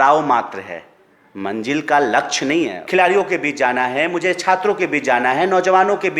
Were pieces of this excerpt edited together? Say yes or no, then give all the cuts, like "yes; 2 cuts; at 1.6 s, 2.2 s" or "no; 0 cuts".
yes; 1 cut; at 2.8 s